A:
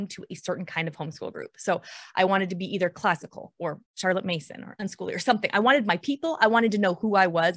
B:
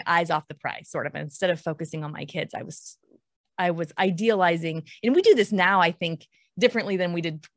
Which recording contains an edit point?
A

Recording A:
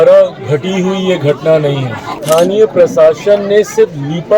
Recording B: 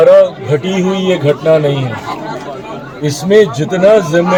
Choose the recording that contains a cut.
A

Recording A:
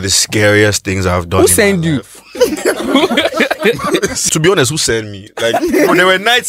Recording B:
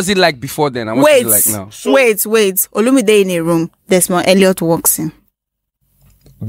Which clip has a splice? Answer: A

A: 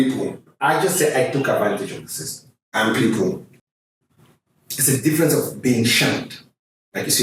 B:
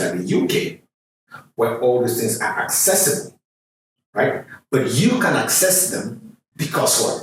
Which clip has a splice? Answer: A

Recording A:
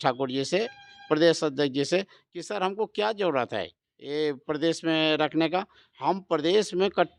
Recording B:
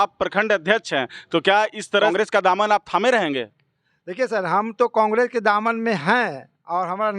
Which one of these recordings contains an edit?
B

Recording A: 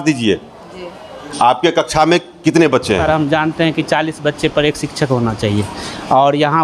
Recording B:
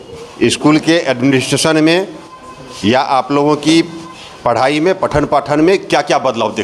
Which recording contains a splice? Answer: A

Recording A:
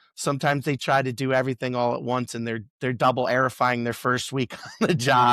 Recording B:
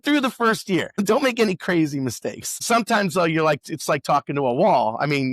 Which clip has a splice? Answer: B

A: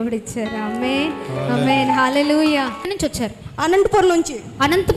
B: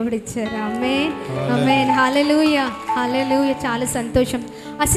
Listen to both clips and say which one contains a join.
A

